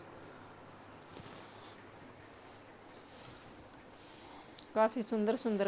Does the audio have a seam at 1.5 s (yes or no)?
no